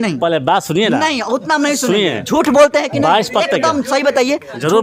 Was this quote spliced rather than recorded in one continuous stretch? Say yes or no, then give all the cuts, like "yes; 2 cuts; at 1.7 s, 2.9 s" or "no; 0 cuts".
no; 0 cuts